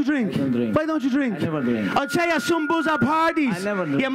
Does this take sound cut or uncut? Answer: uncut